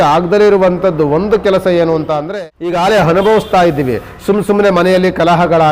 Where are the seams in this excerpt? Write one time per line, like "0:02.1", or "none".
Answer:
0:02.2

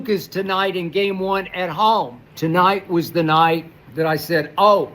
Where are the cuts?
0:02.2
0:03.8

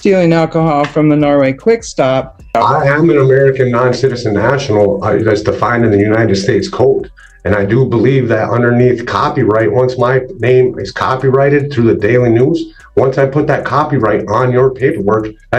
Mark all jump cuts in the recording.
0:02.5

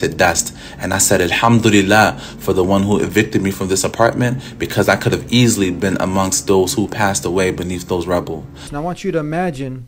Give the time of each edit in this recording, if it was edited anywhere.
0:08.7

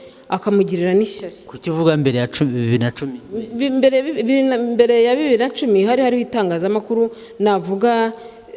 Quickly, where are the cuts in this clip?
none

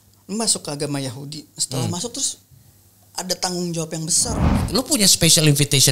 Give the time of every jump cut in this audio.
0:04.6

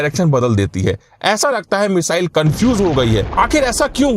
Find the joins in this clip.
0:03.3

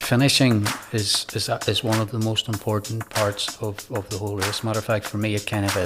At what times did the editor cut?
none

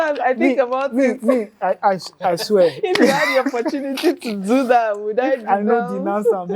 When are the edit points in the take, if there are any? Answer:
none

